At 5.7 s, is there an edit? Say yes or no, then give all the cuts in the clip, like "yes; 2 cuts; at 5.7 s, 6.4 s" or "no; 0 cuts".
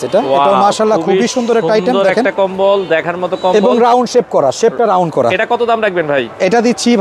no; 0 cuts